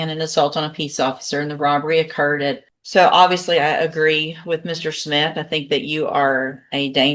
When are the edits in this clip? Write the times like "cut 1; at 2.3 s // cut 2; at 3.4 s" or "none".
cut 1; at 2.7 s